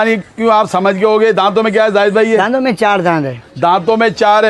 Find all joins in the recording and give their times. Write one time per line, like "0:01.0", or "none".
none